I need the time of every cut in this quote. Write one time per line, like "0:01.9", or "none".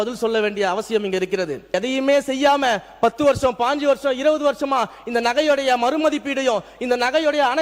0:01.7